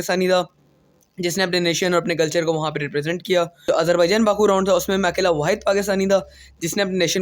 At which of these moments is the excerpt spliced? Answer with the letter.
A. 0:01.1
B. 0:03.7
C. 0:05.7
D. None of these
B